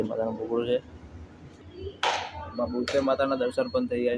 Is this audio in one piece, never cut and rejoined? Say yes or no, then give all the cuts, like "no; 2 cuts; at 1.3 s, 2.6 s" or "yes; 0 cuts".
no; 1 cut; at 1.5 s